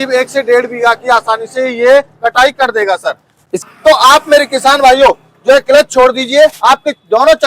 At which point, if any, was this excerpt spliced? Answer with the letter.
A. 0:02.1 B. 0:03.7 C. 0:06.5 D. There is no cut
B